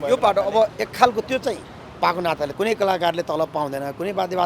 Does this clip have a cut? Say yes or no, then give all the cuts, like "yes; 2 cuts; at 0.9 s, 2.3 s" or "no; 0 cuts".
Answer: yes; 1 cut; at 2.5 s